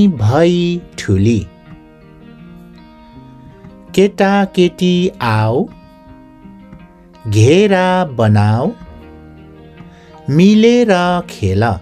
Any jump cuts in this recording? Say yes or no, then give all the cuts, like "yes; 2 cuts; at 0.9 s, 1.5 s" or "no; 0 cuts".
yes; 2 cuts; at 1.5 s, 3.6 s